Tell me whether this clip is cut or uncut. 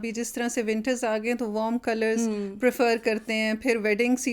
uncut